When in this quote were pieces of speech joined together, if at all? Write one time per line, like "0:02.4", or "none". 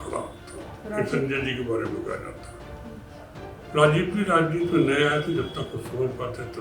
none